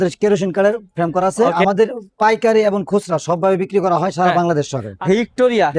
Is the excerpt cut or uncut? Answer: cut